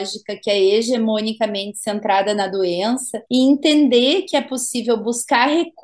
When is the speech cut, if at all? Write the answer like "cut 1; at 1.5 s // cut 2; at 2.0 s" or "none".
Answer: cut 1; at 3.1 s